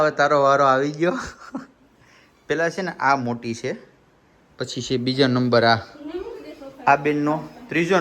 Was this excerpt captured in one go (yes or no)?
yes